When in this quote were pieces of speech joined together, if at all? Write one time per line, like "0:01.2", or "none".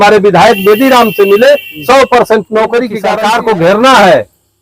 0:03.0